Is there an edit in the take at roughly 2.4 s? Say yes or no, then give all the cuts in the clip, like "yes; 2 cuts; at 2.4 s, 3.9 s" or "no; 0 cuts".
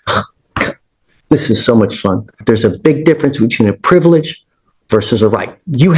yes; 1 cut; at 2.4 s